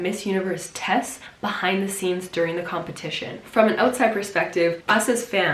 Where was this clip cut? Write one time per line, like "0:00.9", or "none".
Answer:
none